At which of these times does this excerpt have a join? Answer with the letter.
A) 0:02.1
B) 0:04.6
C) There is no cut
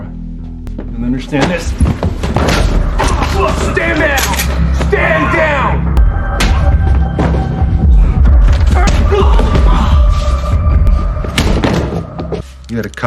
C